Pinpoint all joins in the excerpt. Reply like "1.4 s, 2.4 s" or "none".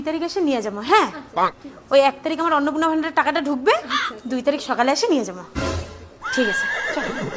none